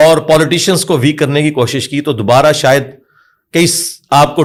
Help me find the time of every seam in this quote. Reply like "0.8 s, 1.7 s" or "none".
none